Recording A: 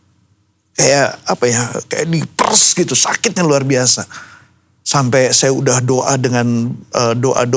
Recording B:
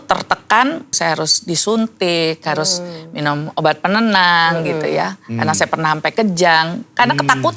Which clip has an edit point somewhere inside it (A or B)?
B